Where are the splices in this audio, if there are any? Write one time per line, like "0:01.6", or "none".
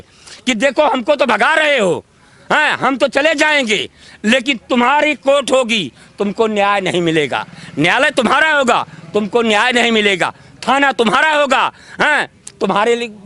none